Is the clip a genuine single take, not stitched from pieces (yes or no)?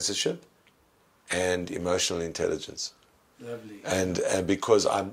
yes